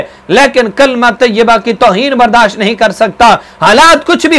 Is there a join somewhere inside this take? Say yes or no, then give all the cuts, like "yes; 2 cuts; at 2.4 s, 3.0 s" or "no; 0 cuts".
no; 0 cuts